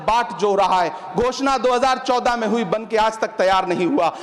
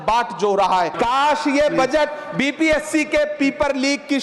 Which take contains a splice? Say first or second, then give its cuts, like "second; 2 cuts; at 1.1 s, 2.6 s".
second; 1 cut; at 0.9 s